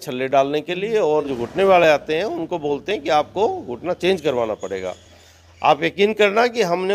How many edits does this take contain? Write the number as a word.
one